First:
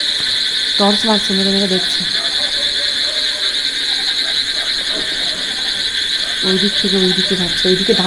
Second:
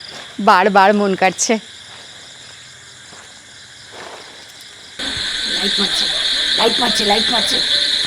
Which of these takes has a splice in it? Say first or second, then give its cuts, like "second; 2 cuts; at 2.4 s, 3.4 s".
second; 1 cut; at 5.0 s